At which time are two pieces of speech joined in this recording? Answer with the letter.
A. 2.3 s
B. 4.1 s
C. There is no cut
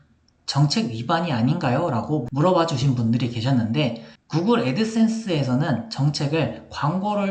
B